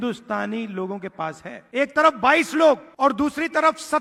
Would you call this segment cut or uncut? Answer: cut